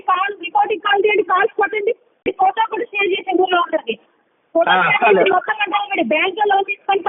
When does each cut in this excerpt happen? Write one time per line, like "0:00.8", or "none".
0:02.1